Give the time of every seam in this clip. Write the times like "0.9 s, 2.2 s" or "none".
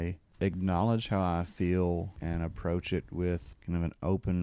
2.2 s